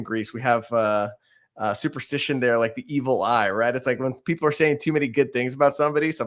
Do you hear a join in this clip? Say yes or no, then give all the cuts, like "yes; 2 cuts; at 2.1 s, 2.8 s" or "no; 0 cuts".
no; 0 cuts